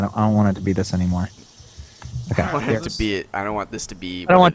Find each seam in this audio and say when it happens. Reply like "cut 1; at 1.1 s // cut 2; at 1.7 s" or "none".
none